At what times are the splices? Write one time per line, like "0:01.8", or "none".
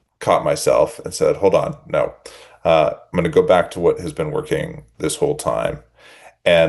none